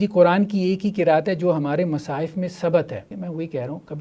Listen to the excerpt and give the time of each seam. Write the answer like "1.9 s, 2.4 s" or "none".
3.1 s